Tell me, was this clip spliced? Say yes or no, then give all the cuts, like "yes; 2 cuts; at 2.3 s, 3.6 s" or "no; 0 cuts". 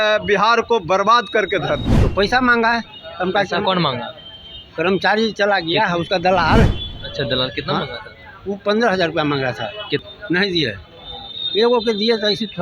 yes; 2 cuts; at 2.0 s, 10.0 s